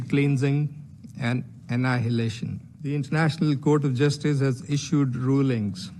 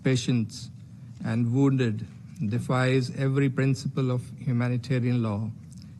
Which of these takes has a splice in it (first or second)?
first